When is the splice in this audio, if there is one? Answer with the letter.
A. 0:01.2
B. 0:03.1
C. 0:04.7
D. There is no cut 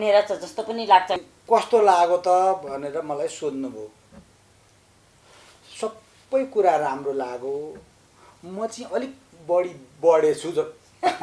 A